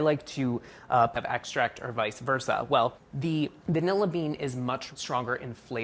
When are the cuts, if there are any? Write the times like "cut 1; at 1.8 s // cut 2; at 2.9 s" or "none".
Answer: none